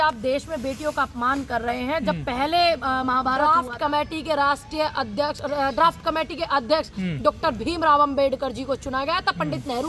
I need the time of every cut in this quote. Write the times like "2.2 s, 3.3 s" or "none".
3.4 s